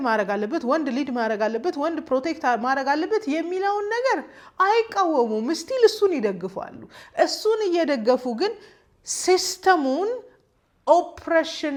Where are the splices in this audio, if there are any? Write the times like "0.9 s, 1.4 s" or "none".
none